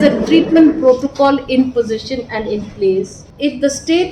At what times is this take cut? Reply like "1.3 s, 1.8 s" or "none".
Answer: 3.2 s